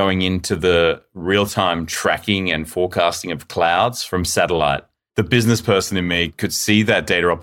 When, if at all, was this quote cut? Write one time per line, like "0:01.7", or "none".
0:04.0
0:04.9
0:06.3